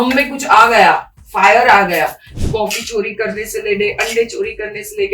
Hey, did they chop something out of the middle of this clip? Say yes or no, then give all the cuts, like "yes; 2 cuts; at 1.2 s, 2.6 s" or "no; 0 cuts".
yes; 1 cut; at 2.3 s